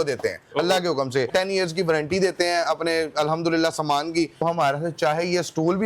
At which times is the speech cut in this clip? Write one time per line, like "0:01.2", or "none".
0:01.3
0:04.4